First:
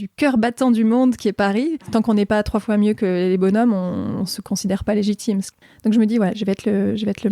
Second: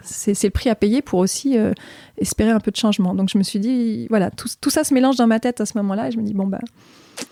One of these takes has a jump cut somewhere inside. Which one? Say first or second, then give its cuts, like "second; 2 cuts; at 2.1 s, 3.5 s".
first; 2 cuts; at 1.9 s, 5.5 s